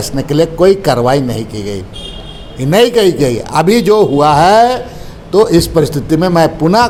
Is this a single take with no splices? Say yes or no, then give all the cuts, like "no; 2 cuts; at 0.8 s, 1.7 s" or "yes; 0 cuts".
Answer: yes; 0 cuts